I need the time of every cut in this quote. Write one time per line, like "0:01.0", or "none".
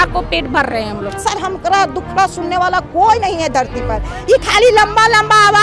0:01.2